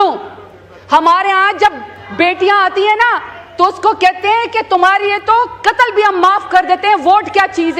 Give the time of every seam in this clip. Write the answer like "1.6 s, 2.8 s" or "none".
none